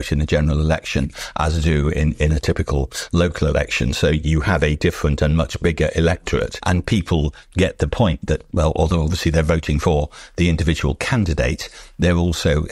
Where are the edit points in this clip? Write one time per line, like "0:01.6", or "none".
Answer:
none